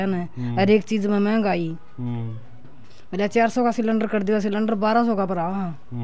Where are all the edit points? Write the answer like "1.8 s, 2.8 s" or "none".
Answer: none